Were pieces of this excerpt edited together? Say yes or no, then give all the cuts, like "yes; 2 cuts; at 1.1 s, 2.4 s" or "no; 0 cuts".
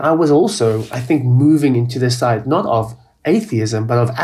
no; 0 cuts